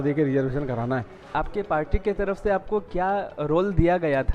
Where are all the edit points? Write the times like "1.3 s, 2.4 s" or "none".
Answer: 1.2 s

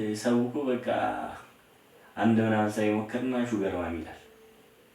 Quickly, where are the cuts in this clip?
none

